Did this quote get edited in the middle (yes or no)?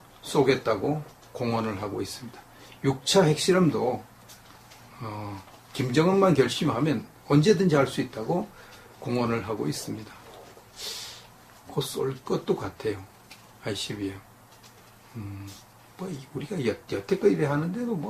yes